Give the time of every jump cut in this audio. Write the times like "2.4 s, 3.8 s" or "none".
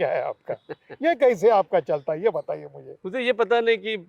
none